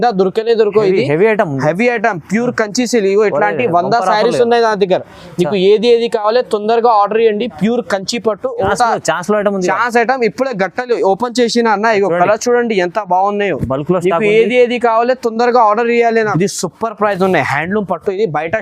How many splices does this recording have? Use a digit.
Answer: 2